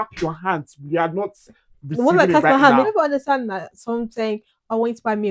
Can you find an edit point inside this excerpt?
yes; 1 cut; at 2.9 s

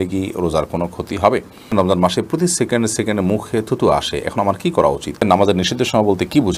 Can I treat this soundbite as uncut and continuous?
no; 2 cuts; at 1.7 s, 5.2 s

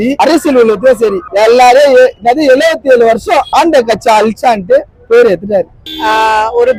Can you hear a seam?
no; 0 cuts

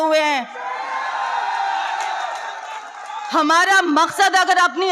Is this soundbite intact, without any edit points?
yes; 0 cuts

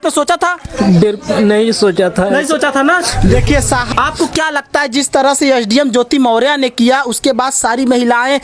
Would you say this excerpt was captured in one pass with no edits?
no; 1 cut; at 3.9 s

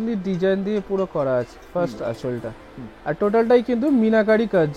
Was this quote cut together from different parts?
no; 0 cuts

